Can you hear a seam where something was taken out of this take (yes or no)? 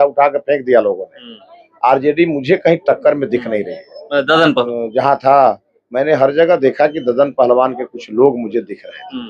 yes